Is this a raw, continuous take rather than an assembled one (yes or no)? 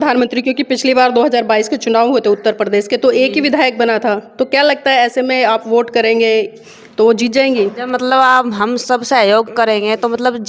yes